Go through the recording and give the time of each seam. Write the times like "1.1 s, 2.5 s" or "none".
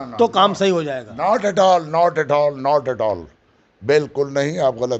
none